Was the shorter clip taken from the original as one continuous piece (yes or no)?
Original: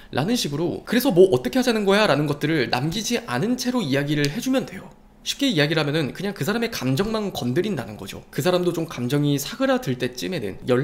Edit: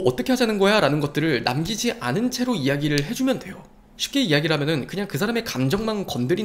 yes